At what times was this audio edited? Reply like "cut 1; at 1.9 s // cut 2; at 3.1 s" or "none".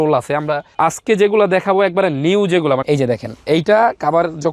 cut 1; at 2.8 s